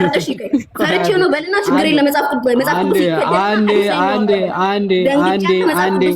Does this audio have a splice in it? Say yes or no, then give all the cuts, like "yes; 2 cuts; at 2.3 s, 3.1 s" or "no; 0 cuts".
no; 0 cuts